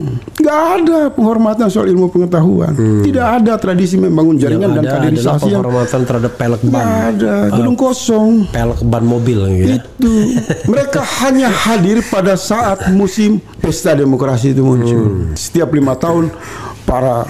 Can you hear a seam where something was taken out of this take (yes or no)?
yes